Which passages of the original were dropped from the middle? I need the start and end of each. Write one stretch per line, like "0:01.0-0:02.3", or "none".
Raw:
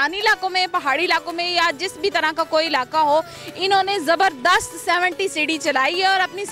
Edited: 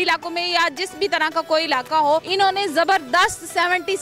0:03.3-0:03.6